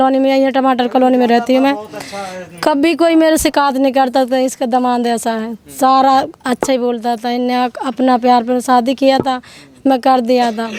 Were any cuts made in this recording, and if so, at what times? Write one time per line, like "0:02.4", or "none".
none